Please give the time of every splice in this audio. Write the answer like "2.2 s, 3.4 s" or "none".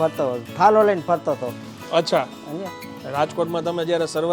2.8 s